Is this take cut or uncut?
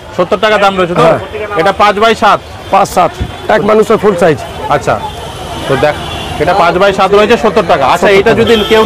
uncut